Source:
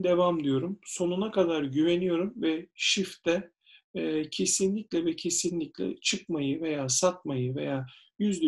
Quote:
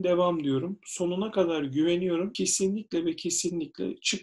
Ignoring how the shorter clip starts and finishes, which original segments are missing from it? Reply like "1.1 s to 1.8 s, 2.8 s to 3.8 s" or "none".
2.3 s to 4.3 s